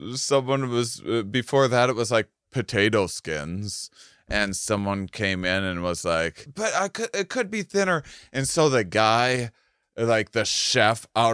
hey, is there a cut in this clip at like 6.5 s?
yes; 1 cut; at 6.5 s

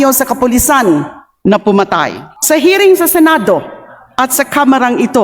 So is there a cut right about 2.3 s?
yes; 1 cut; at 2.3 s

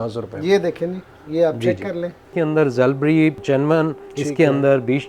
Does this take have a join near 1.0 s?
no; 2 cuts; at 2.3 s, 3.4 s

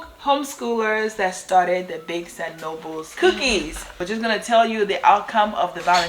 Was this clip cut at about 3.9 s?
yes; 2 cuts; at 3.1 s, 3.9 s

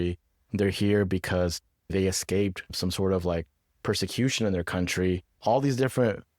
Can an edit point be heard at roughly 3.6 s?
no; 1 cut; at 1.9 s

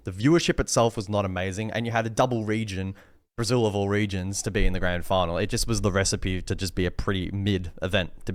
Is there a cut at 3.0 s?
no; 0 cuts

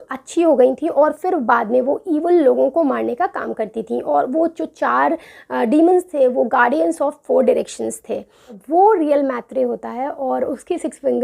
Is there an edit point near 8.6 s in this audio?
yes; 1 cut; at 8.6 s

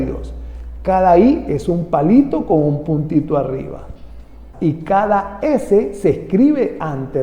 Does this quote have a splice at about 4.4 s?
yes; 1 cut; at 4.4 s

